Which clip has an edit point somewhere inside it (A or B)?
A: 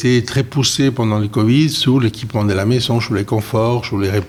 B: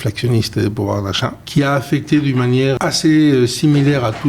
B